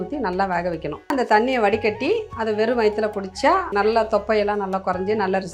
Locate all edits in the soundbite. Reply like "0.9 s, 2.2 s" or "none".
1.1 s, 3.7 s